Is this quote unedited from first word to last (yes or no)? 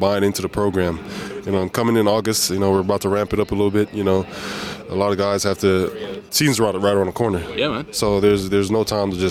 no